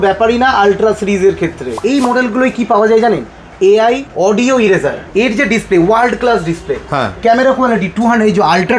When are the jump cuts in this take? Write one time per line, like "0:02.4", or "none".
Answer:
0:01.8
0:04.1
0:05.0